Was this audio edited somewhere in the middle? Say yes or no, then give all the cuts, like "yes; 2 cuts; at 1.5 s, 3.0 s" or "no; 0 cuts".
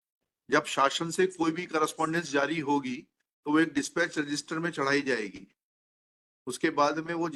no; 0 cuts